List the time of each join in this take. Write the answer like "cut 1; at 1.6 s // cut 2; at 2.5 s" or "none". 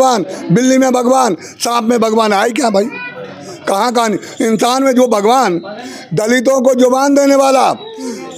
none